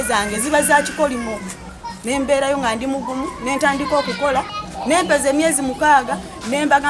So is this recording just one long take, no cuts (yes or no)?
no